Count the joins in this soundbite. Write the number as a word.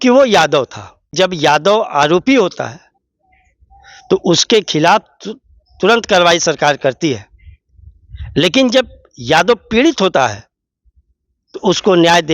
one